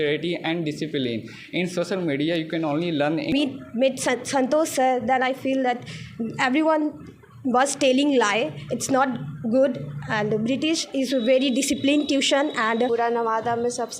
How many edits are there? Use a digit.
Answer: 2